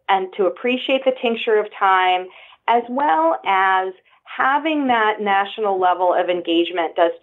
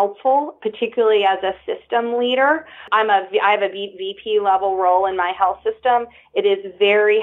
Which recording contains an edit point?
second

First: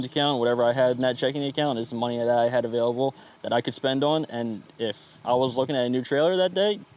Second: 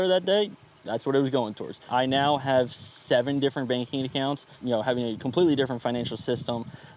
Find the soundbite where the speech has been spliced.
second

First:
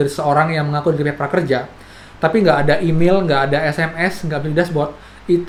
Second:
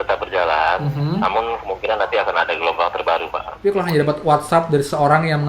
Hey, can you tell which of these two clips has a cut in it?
second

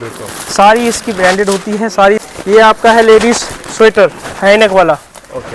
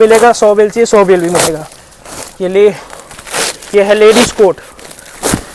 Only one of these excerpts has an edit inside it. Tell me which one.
first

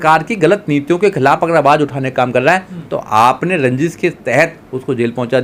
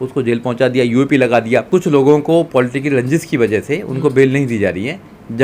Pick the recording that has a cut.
second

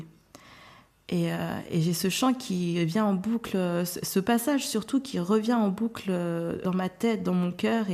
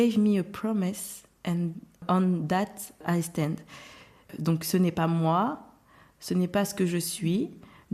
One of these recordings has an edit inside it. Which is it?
first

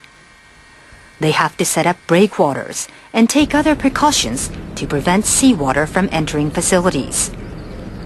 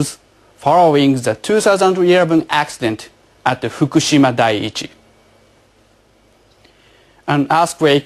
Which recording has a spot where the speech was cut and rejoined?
second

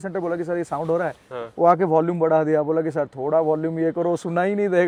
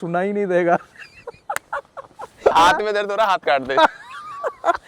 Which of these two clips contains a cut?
second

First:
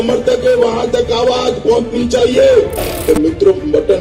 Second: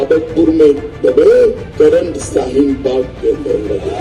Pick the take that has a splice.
second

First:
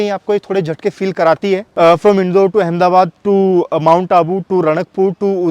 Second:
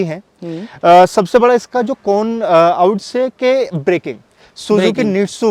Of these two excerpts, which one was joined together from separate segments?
first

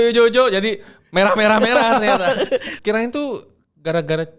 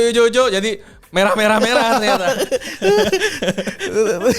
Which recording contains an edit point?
first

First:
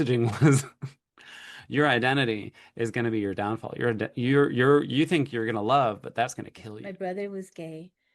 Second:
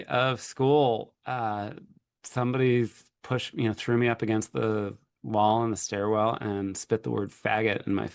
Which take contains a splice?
first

